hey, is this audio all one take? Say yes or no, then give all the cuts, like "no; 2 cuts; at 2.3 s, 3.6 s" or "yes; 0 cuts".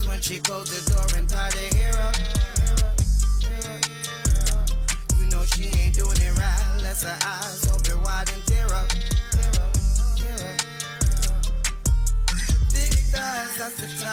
yes; 0 cuts